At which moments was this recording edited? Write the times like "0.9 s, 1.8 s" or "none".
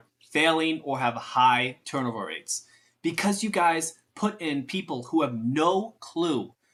none

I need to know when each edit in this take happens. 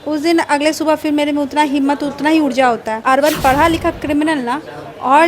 3.0 s

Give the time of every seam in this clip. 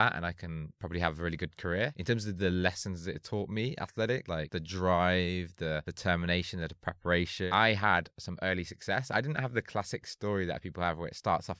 2.0 s, 4.4 s, 5.9 s, 7.5 s

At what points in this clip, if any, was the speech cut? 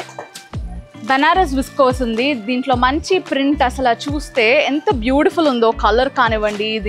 none

